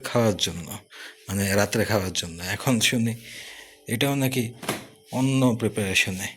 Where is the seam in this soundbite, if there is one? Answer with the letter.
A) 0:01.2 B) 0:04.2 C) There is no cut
C